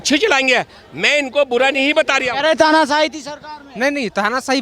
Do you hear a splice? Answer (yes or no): no